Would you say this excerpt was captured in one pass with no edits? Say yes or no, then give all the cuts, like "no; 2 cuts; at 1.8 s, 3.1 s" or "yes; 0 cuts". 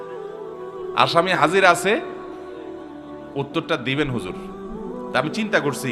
no; 1 cut; at 0.9 s